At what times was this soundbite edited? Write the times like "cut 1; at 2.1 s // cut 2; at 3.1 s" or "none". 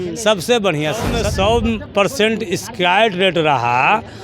cut 1; at 1.2 s

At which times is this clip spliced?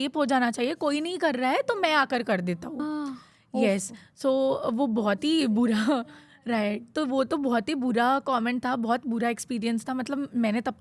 none

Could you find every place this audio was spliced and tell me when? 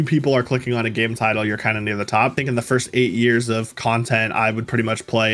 cut 1; at 2.4 s

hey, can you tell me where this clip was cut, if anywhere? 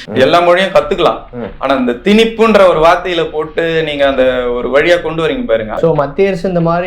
cut 1; at 5.7 s

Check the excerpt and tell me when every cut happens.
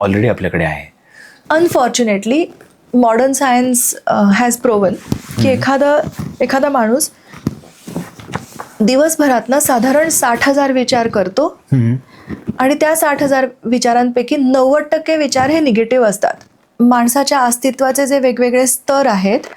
cut 1; at 1.3 s // cut 2; at 16.6 s

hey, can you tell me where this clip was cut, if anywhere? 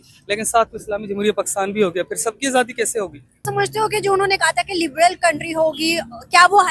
cut 1; at 3.4 s

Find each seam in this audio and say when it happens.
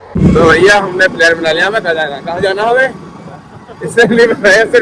none

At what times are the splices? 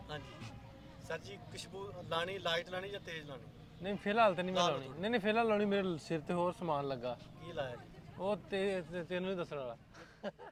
none

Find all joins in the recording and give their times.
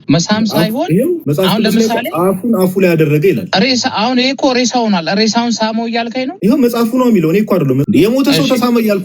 cut 1; at 1.2 s // cut 2; at 3.4 s // cut 3; at 6.3 s // cut 4; at 7.8 s

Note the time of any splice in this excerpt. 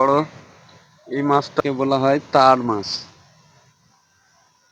cut 1; at 1.6 s

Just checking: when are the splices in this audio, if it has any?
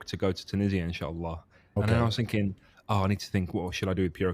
cut 1; at 1.6 s

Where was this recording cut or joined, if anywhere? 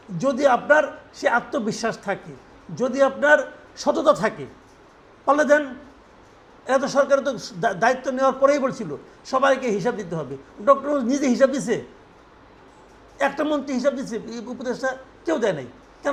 none

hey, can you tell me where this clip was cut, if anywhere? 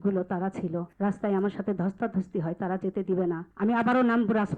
cut 1; at 0.9 s // cut 2; at 3.5 s

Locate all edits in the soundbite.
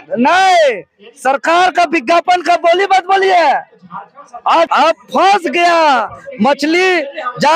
cut 1; at 4.7 s

